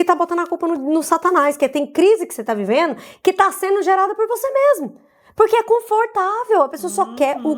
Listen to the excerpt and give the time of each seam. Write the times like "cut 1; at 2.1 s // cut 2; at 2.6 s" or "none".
none